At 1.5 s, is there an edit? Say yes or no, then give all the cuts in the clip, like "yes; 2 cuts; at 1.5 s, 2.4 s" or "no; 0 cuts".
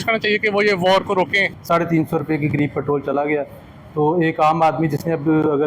yes; 1 cut; at 1.5 s